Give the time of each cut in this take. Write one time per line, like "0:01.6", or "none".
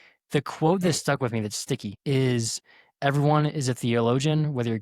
0:01.9